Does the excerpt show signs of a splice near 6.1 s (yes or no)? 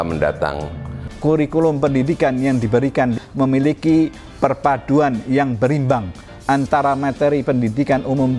no